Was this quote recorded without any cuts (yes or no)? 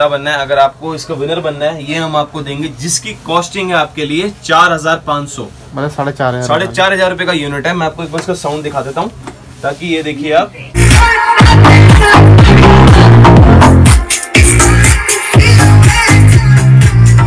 no